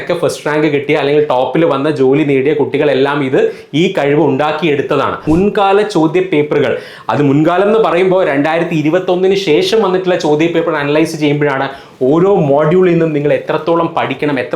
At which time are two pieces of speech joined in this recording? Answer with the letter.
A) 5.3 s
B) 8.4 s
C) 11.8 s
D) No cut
A